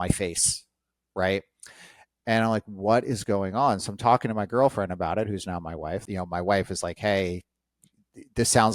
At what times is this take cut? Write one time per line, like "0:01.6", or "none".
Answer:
0:06.0